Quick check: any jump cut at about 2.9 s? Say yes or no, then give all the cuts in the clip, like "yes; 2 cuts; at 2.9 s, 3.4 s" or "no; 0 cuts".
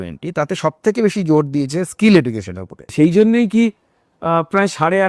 yes; 1 cut; at 2.9 s